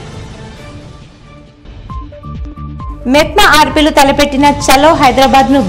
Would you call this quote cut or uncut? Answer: cut